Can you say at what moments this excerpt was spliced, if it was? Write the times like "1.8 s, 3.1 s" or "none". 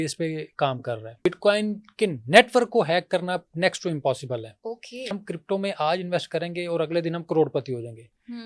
1.3 s, 5.2 s